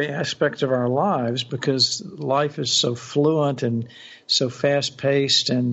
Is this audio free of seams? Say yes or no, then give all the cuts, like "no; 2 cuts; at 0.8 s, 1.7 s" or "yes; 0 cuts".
yes; 0 cuts